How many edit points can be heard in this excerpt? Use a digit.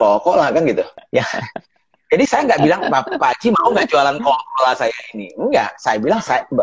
1